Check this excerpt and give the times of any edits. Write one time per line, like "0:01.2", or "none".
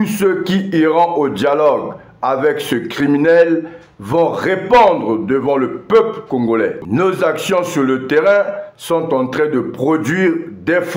0:06.8